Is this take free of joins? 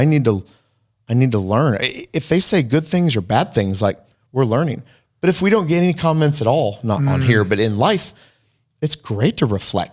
yes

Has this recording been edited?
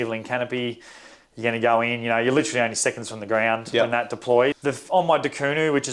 yes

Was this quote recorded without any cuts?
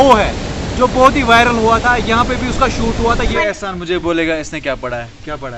no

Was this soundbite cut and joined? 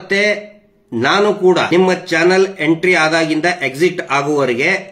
yes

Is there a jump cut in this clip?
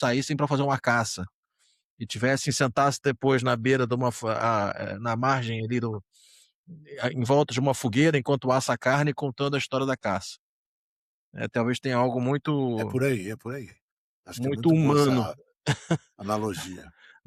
no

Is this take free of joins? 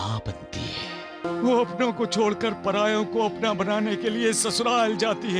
no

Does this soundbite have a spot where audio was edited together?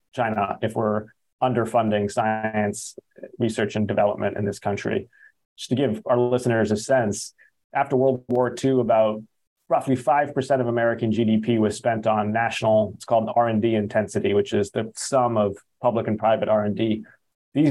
no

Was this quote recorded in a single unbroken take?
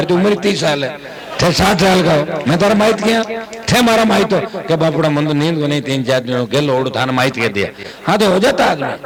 yes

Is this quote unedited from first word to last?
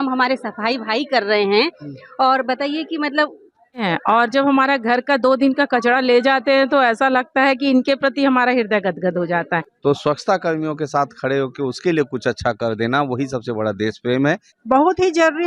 no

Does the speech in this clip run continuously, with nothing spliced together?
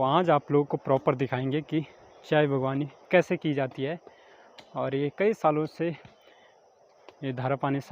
yes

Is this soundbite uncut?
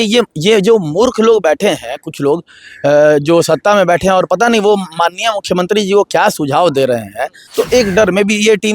no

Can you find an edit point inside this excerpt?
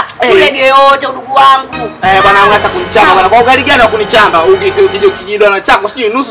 no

